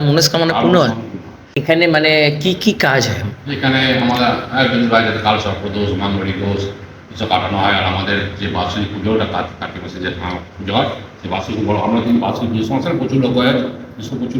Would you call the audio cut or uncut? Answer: cut